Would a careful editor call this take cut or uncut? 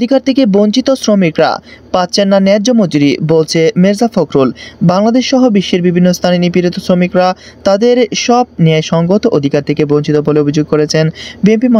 uncut